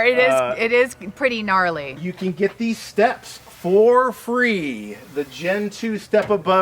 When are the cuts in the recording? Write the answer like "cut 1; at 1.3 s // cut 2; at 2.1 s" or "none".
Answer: cut 1; at 2.0 s

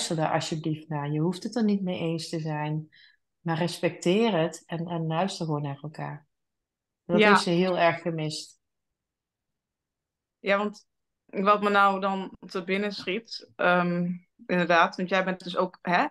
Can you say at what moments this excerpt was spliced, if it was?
none

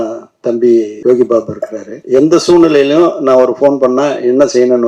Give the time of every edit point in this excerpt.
cut 1; at 0.9 s // cut 2; at 1.9 s

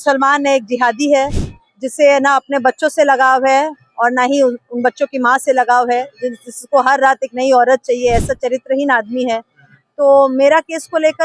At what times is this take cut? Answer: none

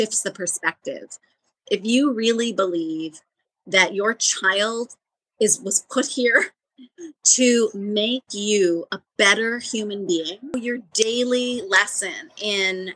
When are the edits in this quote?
cut 1; at 10.5 s

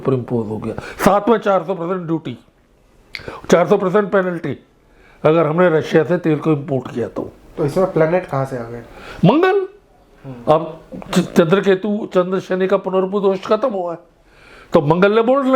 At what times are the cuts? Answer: cut 1; at 7.4 s

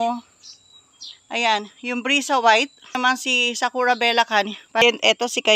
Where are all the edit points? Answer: cut 1; at 3.0 s // cut 2; at 4.8 s

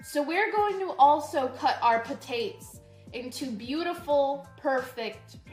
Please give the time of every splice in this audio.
none

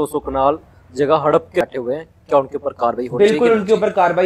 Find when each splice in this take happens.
cut 1; at 1.6 s

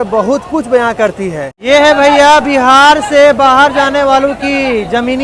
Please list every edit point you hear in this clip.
cut 1; at 1.5 s

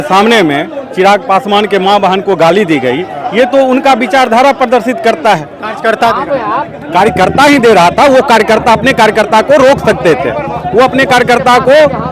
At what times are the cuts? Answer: none

